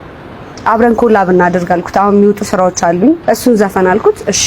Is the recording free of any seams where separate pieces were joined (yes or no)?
no